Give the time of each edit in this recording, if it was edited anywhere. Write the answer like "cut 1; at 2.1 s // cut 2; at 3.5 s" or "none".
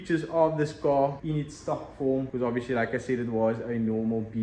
cut 1; at 1.2 s // cut 2; at 2.3 s

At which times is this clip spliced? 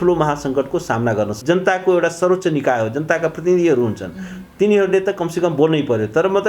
cut 1; at 1.4 s

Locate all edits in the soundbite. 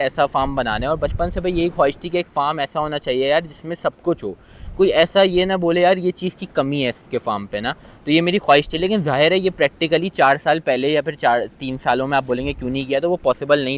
none

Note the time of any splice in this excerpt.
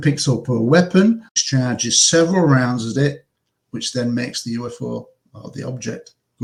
cut 1; at 1.3 s

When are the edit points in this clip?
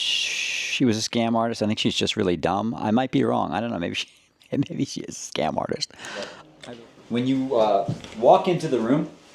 cut 1; at 6.5 s

